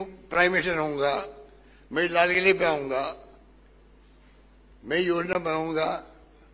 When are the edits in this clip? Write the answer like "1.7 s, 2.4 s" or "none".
none